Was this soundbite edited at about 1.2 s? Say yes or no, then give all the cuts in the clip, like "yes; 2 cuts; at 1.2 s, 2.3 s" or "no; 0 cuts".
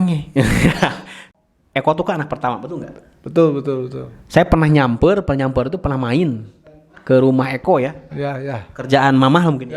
yes; 1 cut; at 1.2 s